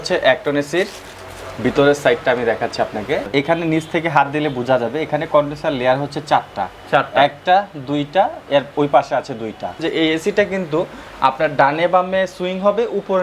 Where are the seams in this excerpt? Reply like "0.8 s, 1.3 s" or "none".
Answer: 3.3 s, 9.8 s

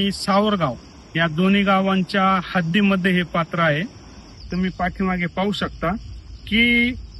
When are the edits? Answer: 4.3 s

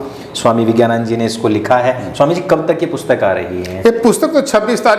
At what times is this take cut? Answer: none

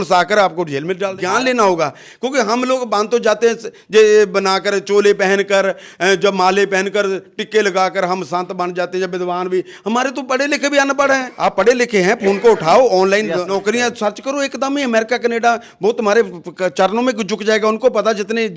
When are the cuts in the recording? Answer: 1.1 s, 11.3 s, 13.5 s

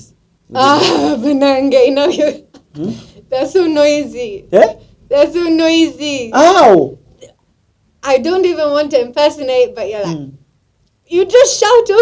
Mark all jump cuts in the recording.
none

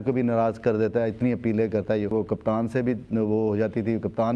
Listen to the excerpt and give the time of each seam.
2.1 s

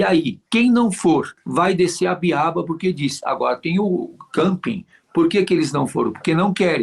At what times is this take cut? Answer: 1.4 s

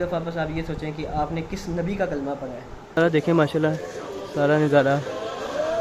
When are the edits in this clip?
2.9 s

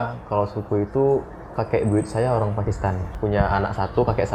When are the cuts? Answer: 3.1 s

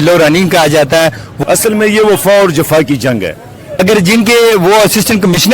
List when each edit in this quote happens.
1.3 s, 3.7 s

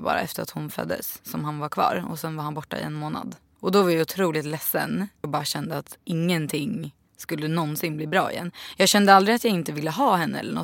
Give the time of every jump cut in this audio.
3.4 s, 5.3 s

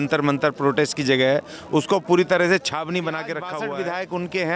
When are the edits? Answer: 3.5 s

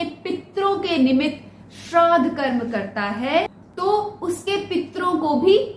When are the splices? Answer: none

